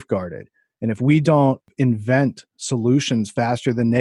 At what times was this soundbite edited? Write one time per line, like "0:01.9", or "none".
0:01.7